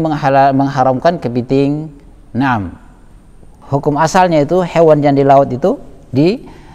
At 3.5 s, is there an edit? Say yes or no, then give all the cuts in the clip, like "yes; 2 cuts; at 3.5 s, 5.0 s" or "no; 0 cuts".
yes; 1 cut; at 3.5 s